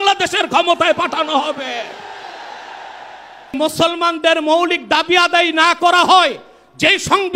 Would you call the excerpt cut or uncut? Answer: cut